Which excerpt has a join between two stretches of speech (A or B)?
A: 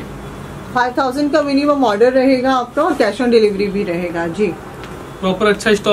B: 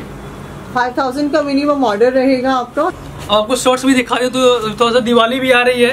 B